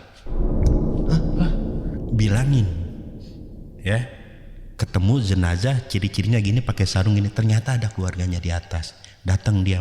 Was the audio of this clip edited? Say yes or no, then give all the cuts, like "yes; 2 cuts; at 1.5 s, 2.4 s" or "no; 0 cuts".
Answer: yes; 1 cut; at 2.0 s